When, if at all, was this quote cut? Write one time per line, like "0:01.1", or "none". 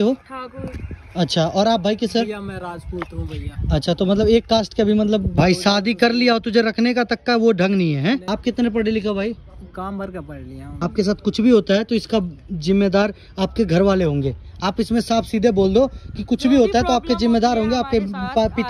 0:05.3
0:08.2
0:10.6